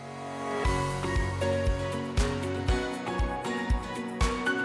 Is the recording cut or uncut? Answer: uncut